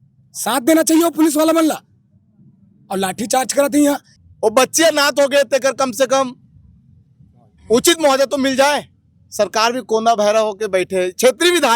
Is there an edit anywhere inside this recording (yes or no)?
yes